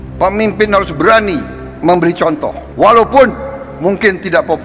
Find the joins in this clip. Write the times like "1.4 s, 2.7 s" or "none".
2.6 s